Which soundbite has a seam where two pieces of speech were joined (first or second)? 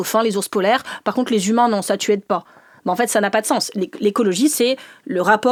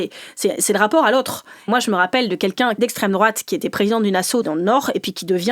second